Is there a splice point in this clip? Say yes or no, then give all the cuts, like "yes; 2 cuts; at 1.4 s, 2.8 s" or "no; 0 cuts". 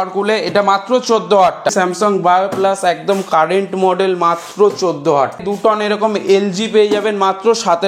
yes; 2 cuts; at 1.7 s, 5.4 s